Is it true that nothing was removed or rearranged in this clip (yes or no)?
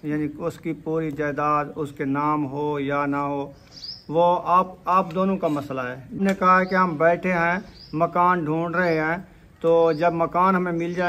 no